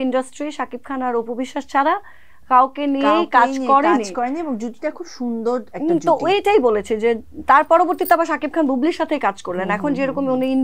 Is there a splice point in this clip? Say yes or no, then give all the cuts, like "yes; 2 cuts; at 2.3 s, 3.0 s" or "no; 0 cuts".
no; 0 cuts